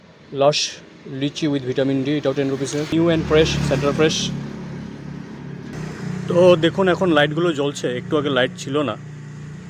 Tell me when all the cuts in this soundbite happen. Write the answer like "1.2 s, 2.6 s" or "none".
2.8 s, 5.8 s